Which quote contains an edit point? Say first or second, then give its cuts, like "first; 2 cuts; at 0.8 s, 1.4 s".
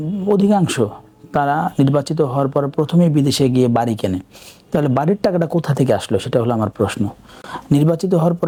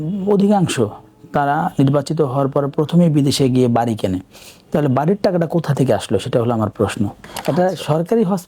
second; 1 cut; at 7.3 s